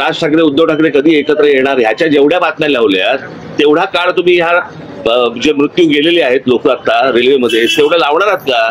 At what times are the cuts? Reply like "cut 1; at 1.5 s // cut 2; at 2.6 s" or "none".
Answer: none